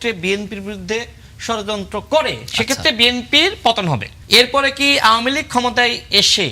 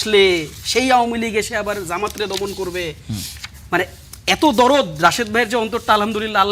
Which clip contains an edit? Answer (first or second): first